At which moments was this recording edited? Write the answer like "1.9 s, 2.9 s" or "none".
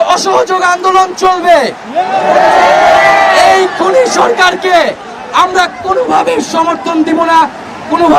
none